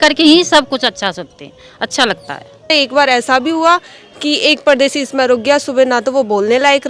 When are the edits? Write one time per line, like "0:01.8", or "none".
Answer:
0:02.7